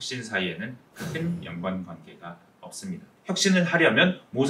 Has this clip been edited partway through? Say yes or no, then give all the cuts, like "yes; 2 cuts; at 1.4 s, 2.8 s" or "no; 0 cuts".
yes; 1 cut; at 3.1 s